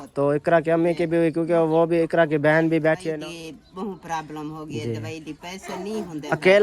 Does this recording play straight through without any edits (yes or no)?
no